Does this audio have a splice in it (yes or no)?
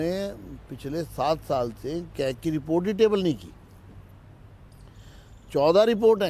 no